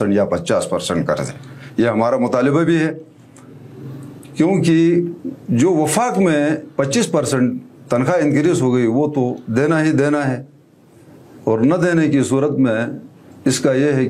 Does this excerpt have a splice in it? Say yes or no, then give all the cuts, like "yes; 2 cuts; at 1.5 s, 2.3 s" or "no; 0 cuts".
no; 0 cuts